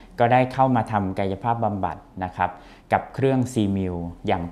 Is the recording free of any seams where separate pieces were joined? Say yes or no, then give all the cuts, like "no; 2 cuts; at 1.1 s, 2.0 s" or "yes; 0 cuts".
yes; 0 cuts